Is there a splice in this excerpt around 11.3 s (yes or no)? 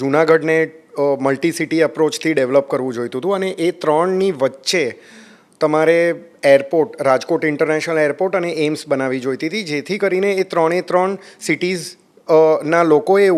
no